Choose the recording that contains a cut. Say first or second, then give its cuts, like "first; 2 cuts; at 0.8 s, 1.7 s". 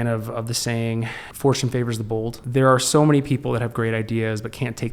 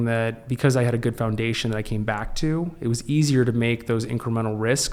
first; 2 cuts; at 1.2 s, 2.4 s